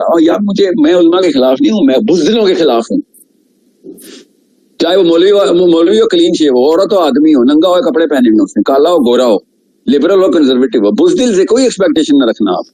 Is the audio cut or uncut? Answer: uncut